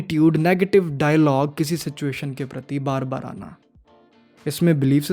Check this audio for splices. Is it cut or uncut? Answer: uncut